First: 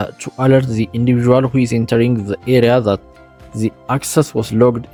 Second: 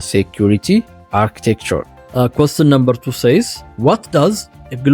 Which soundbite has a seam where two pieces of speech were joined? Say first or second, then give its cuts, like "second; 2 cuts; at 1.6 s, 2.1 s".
second; 3 cuts; at 1.0 s, 2.0 s, 3.6 s